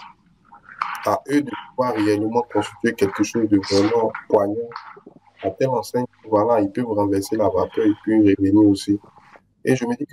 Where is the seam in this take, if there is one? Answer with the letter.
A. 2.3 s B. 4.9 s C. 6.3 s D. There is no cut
D